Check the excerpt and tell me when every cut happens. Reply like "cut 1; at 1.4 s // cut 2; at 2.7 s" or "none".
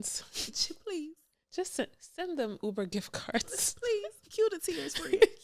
none